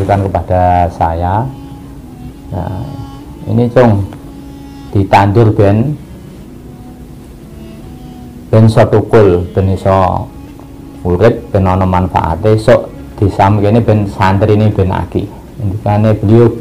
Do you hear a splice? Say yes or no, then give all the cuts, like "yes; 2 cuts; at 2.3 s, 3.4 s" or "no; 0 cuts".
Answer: no; 0 cuts